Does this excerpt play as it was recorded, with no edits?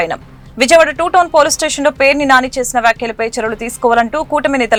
yes; 0 cuts

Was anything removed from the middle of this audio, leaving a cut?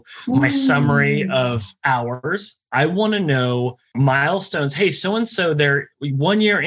yes; 2 cuts; at 2.2 s, 4.0 s

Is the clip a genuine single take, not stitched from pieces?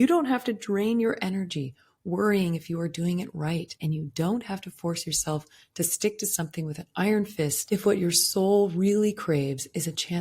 no; 2 cuts; at 3.7 s, 7.6 s

